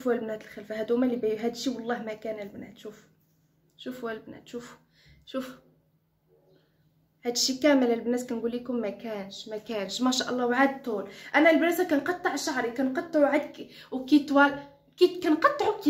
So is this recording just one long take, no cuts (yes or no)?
yes